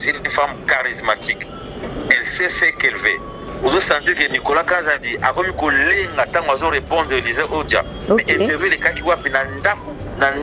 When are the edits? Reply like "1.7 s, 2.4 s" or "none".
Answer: 3.4 s